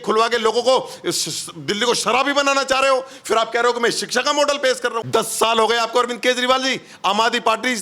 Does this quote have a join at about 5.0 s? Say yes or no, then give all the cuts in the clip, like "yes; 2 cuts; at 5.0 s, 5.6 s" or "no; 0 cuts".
yes; 1 cut; at 5.0 s